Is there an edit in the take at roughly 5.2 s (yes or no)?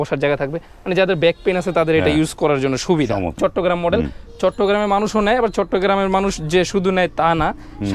no